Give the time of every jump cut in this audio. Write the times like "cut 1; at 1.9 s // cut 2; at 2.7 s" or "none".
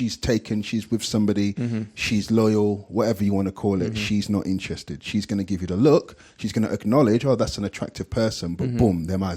none